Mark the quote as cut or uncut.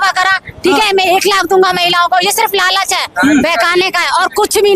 uncut